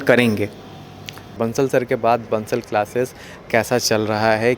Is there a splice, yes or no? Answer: yes